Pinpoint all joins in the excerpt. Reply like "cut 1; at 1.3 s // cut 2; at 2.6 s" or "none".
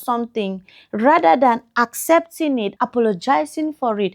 cut 1; at 2.7 s